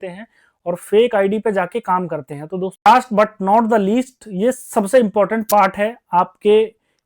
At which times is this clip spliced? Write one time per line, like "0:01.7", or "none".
0:02.9